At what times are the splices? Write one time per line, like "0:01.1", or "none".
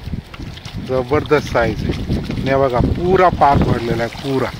none

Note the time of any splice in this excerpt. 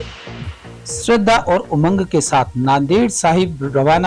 0:01.0

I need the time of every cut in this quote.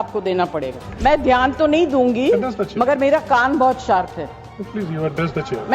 0:00.9

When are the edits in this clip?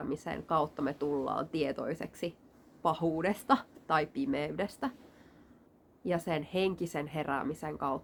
none

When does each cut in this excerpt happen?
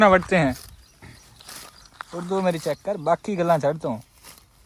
none

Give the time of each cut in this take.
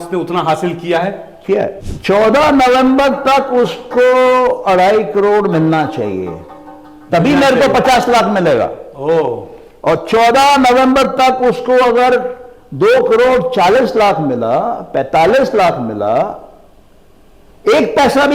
0:01.9

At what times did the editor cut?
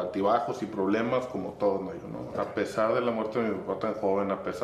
0:02.3

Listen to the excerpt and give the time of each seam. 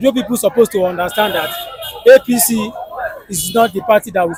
none

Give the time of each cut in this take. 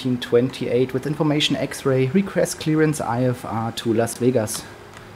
none

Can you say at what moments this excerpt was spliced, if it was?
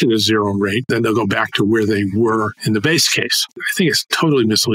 0:00.9
0:03.6

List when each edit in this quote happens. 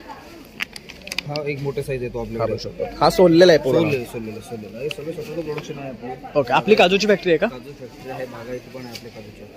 none

